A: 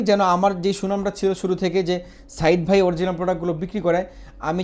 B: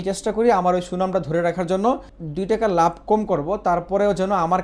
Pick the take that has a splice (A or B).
B